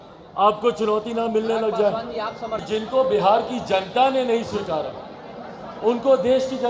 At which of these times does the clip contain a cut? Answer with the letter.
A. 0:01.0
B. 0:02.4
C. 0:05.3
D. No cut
B